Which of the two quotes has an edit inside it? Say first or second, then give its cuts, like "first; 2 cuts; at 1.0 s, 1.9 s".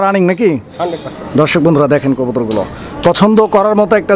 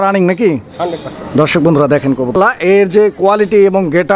second; 1 cut; at 2.4 s